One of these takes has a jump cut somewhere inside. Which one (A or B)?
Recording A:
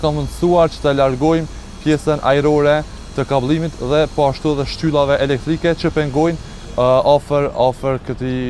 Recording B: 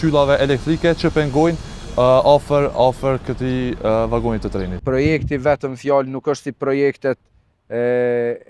B